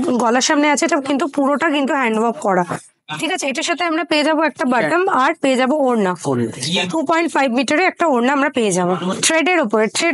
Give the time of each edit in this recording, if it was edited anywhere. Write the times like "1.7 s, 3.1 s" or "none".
none